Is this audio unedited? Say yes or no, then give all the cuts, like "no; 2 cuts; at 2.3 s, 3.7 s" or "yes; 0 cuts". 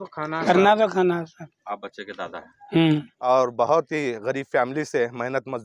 no; 2 cuts; at 1.5 s, 3.1 s